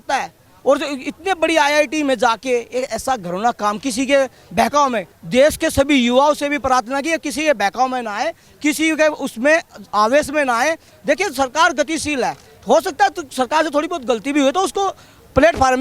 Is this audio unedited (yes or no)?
yes